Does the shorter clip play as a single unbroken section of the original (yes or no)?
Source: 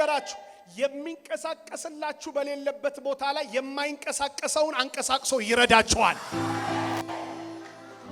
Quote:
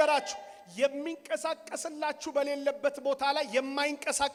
yes